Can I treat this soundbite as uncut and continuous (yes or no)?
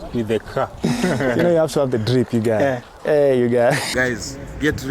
no